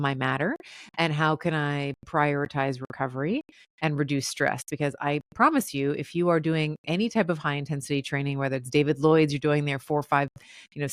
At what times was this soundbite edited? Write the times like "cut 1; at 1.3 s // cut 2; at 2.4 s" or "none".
none